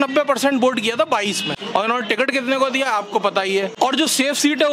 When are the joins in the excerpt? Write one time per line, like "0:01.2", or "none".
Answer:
0:01.5
0:03.7